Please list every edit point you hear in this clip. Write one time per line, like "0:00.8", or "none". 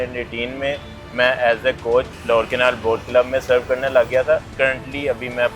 0:02.2
0:04.5